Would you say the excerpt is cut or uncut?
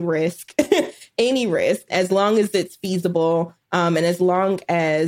cut